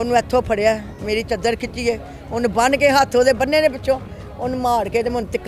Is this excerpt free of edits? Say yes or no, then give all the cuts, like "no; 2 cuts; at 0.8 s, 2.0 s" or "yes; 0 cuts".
yes; 0 cuts